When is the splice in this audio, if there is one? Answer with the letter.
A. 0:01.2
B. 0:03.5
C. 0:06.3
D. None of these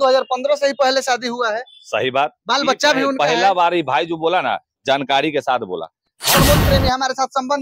C